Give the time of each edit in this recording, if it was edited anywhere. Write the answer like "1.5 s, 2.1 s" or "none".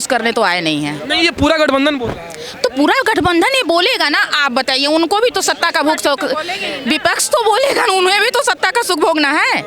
none

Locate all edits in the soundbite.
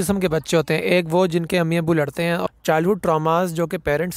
2.4 s

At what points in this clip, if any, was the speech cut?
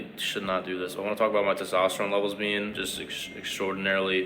none

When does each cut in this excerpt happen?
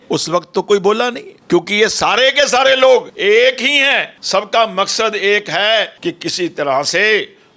1.3 s, 3.1 s, 4.1 s, 5.9 s

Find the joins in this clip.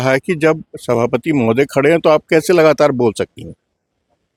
none

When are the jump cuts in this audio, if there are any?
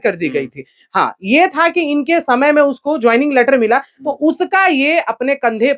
none

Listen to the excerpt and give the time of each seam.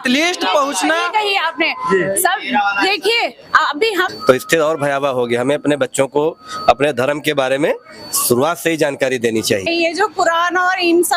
4.1 s, 9.7 s

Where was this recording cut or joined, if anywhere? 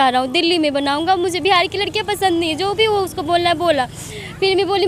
none

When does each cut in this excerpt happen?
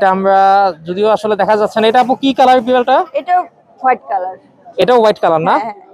none

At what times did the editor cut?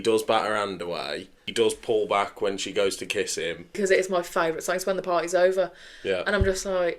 3.8 s

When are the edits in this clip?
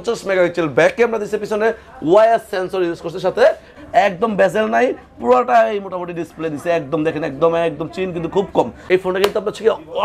3.7 s, 8.8 s

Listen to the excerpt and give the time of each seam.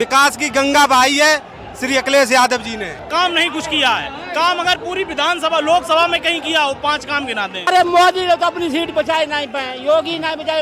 3.0 s, 7.6 s

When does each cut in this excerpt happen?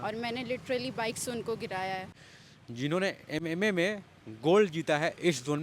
2.2 s

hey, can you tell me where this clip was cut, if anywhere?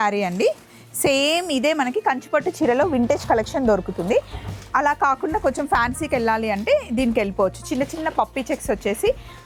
none

